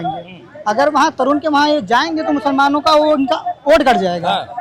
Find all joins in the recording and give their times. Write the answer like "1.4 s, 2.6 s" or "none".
none

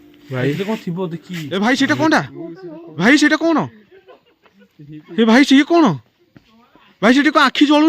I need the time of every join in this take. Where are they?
1.4 s

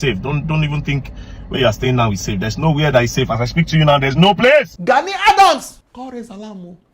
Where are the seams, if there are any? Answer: 4.7 s

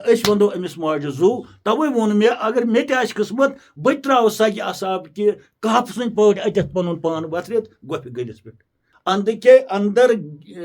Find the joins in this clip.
8.8 s

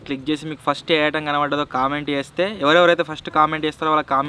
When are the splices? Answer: none

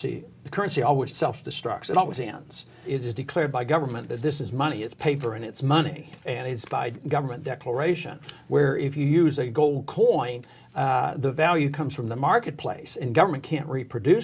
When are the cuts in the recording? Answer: 1.1 s, 2.8 s

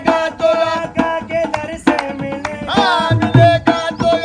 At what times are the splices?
none

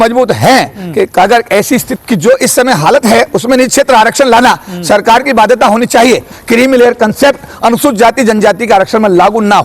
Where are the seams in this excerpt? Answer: 1.9 s, 6.3 s

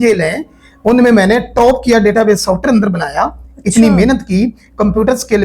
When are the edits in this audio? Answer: none

